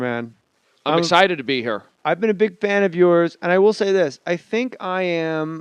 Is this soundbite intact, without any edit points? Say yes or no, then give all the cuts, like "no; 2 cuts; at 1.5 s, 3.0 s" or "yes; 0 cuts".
no; 1 cut; at 2.8 s